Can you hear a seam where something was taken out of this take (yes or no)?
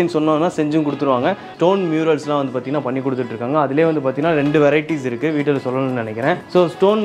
yes